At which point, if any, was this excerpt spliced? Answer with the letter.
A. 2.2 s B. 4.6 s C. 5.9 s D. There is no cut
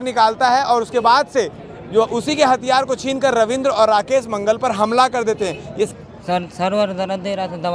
C